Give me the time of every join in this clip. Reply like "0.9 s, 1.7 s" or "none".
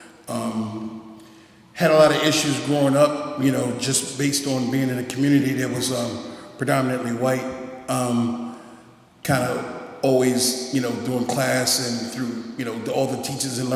6.6 s